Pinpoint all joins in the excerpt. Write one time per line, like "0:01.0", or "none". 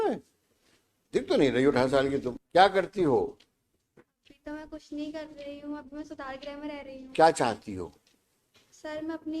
0:02.4
0:07.0